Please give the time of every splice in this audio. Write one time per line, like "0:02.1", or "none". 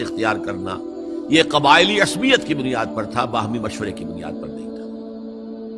0:04.1